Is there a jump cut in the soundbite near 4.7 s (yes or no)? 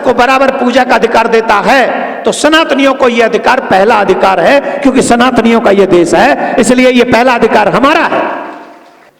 no